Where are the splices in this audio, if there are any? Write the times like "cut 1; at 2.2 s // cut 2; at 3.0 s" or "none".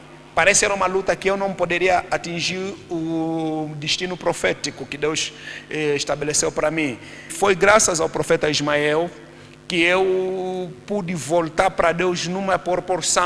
cut 1; at 7.3 s